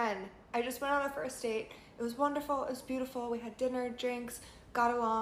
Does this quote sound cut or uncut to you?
uncut